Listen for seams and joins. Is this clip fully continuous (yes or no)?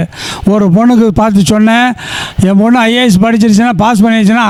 yes